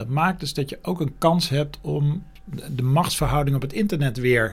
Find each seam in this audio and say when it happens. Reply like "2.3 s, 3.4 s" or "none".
none